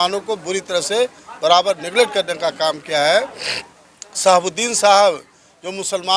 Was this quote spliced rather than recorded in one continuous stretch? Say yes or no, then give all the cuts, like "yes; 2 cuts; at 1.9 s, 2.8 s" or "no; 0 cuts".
no; 0 cuts